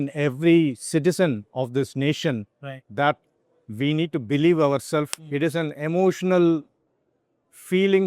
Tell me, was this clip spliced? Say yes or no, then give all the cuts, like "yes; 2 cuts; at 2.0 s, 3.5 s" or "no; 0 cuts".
yes; 1 cut; at 5.2 s